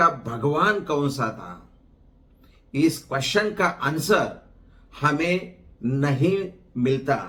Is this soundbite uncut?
yes; 0 cuts

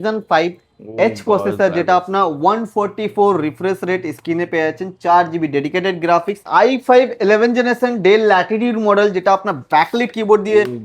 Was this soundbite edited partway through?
yes; 1 cut; at 6.4 s

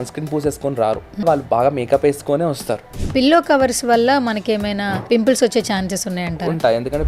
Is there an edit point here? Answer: yes; 3 cuts; at 1.2 s, 2.9 s, 5.0 s

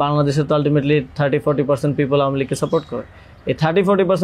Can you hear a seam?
no; 0 cuts

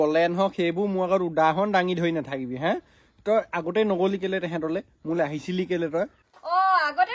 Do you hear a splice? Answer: yes; 1 cut; at 6.2 s

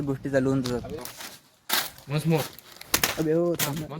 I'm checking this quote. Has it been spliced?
yes; 1 cut; at 1.0 s

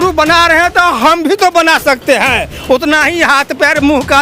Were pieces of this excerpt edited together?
no; 0 cuts

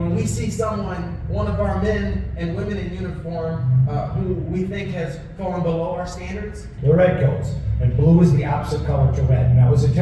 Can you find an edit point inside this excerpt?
yes; 1 cut; at 6.7 s

